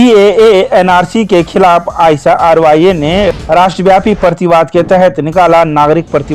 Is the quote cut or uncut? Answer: uncut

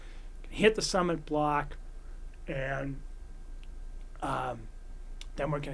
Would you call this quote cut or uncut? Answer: uncut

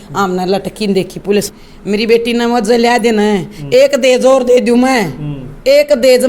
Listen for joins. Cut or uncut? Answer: cut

